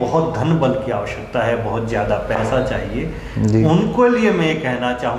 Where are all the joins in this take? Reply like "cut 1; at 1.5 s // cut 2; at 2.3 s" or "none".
none